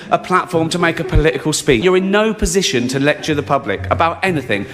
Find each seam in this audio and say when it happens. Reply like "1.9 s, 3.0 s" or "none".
1.8 s

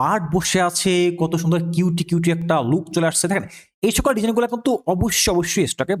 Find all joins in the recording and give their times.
none

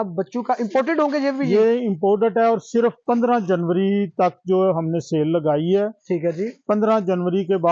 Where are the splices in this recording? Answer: none

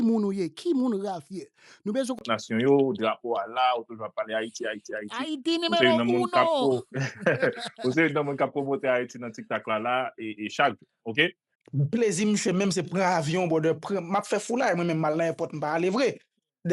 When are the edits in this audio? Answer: 2.2 s, 11.5 s

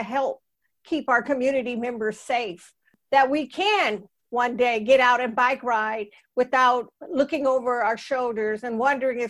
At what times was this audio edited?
2.9 s

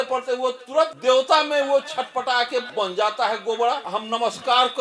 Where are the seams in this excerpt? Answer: 1.0 s, 2.7 s, 3.9 s

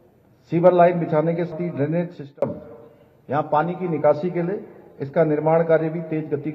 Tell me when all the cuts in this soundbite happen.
1.5 s

